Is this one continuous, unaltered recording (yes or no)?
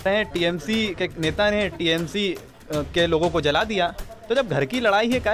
yes